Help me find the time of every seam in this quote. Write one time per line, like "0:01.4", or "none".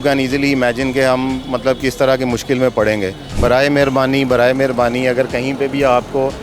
0:03.2

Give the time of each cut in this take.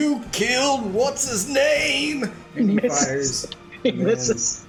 none

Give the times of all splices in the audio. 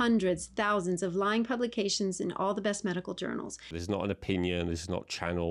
0:03.8

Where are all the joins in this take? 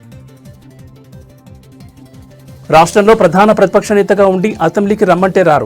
0:02.6

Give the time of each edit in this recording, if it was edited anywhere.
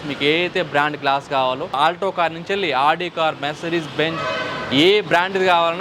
0:01.8

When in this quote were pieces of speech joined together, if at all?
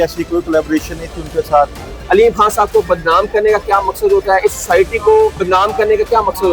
0:01.9
0:05.4

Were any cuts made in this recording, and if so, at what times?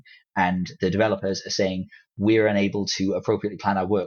none

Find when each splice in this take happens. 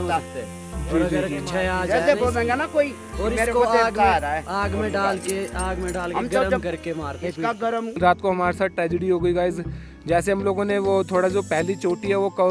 0:08.0

